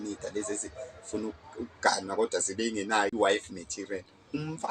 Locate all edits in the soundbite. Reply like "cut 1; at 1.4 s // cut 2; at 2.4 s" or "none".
cut 1; at 3.1 s